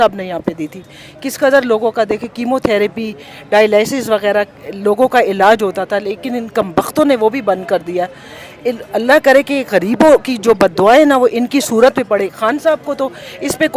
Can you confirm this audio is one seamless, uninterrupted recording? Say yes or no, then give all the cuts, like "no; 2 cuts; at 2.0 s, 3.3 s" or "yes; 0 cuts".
yes; 0 cuts